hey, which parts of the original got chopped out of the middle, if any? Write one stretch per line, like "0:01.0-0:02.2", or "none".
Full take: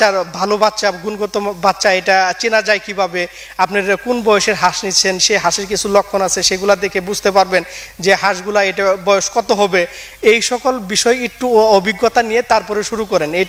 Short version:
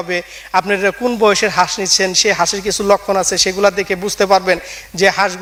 none